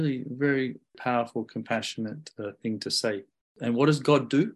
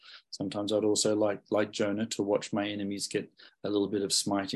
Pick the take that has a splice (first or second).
first